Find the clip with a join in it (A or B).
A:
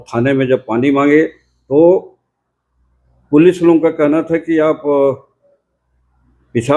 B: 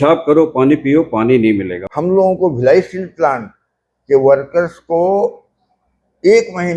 B